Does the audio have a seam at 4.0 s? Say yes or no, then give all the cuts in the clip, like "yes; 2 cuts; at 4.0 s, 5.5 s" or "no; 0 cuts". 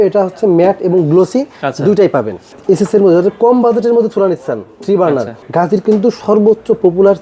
no; 2 cuts; at 2.5 s, 5.4 s